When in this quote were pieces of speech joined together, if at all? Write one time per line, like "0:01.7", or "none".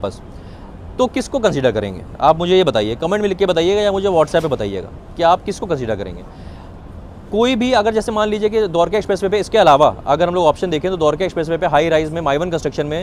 none